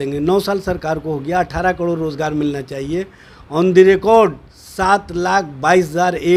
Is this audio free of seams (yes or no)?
yes